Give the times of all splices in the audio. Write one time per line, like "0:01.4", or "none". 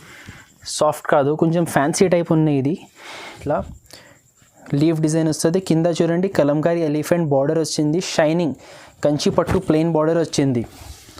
0:03.4